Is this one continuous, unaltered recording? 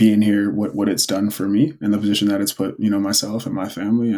yes; 0 cuts

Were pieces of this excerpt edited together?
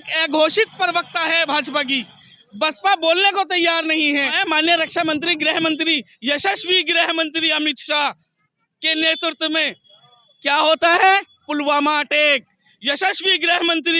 yes; 1 cut; at 4.3 s

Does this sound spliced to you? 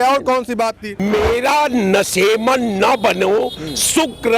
yes; 1 cut; at 1.0 s

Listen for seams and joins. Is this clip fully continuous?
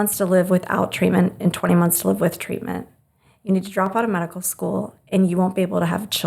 yes; 0 cuts

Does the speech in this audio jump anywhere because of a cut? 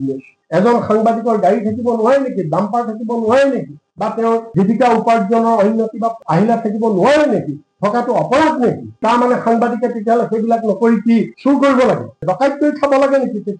no; 0 cuts

